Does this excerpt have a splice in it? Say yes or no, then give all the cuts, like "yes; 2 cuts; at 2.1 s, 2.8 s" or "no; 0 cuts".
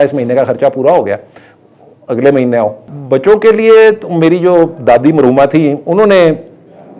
no; 0 cuts